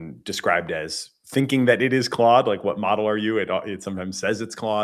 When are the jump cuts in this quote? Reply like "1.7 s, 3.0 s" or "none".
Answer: 3.8 s